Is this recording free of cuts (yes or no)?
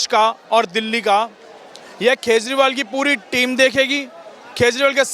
yes